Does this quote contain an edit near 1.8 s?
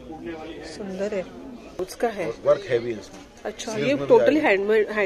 yes; 1 cut; at 1.8 s

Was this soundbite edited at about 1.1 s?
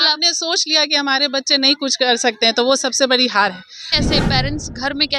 no; 1 cut; at 3.9 s

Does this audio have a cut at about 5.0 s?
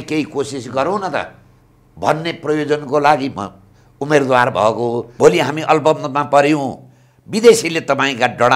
yes; 1 cut; at 5.0 s

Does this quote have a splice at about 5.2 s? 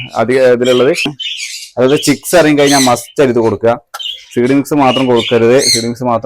no; 1 cut; at 1.2 s

